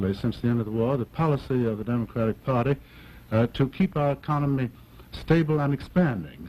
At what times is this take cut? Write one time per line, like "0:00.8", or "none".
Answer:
0:05.5